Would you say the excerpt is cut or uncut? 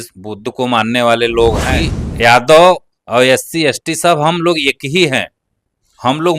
cut